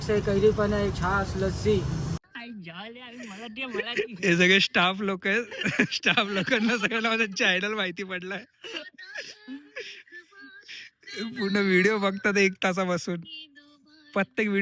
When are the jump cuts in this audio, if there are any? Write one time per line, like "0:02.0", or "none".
0:02.2